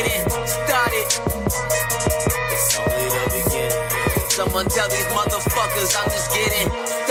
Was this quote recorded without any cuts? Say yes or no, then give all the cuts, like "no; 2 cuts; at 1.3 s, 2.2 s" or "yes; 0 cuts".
yes; 0 cuts